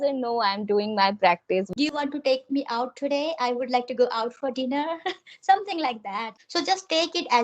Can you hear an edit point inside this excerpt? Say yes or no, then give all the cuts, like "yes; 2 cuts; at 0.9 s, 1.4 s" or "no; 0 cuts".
yes; 2 cuts; at 1.7 s, 6.3 s